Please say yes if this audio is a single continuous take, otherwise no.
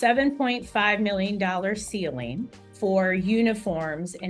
yes